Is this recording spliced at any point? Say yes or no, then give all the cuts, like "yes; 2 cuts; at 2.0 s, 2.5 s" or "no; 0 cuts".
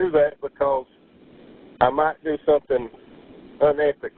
no; 0 cuts